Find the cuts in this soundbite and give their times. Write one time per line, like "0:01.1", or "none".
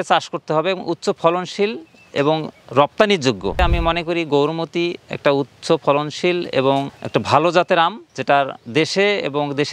0:03.6
0:07.0